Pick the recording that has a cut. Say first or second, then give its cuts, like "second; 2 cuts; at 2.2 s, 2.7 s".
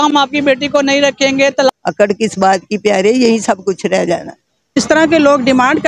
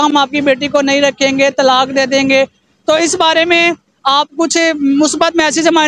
first; 2 cuts; at 1.7 s, 4.8 s